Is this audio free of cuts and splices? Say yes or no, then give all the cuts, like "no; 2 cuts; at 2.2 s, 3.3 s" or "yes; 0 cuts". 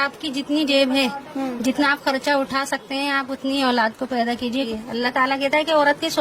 no; 1 cut; at 4.7 s